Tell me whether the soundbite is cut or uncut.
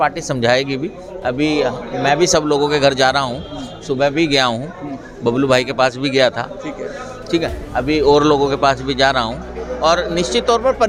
uncut